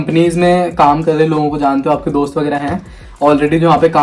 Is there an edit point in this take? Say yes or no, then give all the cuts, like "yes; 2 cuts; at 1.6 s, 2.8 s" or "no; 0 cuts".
no; 0 cuts